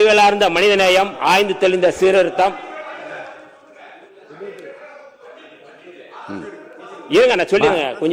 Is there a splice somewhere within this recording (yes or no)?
no